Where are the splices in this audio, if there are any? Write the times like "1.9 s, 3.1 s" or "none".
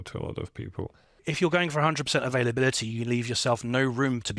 1.2 s